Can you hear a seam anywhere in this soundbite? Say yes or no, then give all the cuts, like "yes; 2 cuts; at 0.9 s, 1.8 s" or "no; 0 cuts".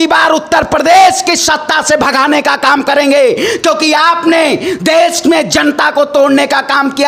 no; 0 cuts